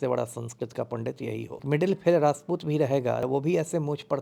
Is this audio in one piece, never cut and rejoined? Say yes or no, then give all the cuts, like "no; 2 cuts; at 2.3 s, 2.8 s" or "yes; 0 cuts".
no; 2 cuts; at 1.6 s, 3.2 s